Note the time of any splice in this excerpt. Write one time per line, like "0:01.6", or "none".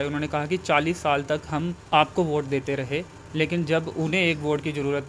0:01.8